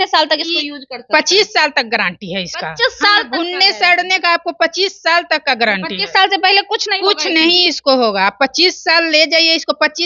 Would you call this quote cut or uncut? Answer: uncut